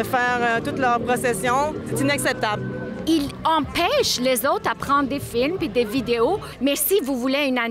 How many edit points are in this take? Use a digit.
2